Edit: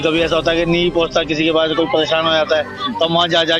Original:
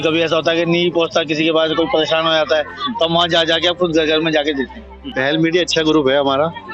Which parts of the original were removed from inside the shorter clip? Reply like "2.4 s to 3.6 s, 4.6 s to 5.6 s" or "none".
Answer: none

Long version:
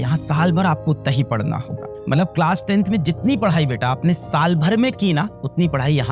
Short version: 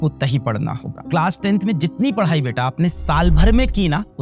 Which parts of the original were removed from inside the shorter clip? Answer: 1.9 s to 2.3 s

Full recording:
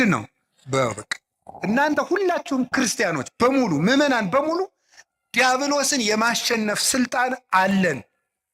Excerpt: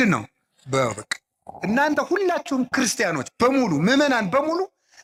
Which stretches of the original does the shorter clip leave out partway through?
none

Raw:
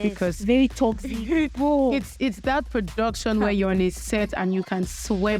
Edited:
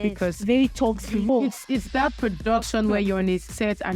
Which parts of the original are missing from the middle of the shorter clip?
1.3 s to 1.8 s

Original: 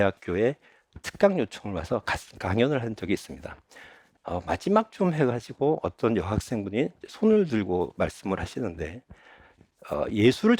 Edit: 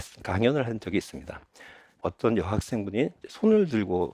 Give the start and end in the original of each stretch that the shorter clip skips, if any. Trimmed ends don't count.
4.2 s to 5.8 s

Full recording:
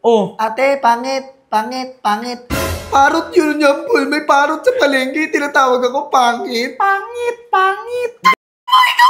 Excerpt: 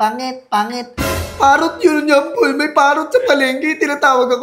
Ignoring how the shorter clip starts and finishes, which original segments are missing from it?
none

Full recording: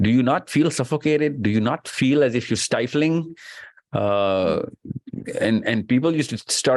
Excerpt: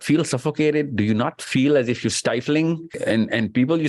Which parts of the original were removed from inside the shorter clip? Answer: 3.4 s to 5.2 s

